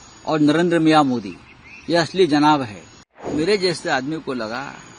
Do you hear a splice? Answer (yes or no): yes